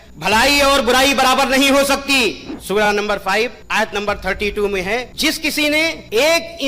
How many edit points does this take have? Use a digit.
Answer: 1